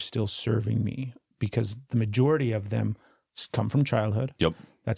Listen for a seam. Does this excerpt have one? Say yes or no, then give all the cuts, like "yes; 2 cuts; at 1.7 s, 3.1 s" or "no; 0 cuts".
no; 0 cuts